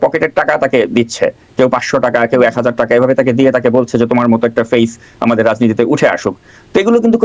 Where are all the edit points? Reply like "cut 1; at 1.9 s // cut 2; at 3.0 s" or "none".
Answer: none